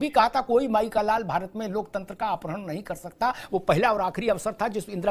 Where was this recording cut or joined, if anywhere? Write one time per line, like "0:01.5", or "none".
none